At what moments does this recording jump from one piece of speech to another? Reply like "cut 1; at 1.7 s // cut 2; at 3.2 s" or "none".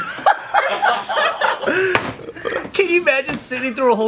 cut 1; at 1.6 s